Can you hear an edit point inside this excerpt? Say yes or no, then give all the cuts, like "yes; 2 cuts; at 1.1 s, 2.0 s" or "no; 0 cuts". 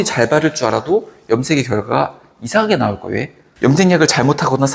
yes; 1 cut; at 3.4 s